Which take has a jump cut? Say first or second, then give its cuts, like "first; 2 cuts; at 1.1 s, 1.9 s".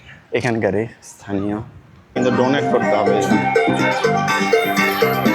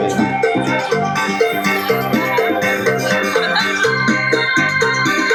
first; 1 cut; at 2.2 s